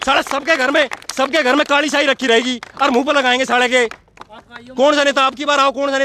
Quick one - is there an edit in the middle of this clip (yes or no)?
no